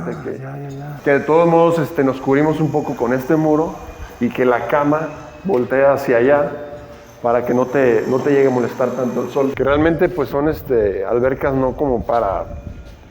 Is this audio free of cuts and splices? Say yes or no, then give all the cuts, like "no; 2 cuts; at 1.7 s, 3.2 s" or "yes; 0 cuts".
no; 2 cuts; at 1.0 s, 9.5 s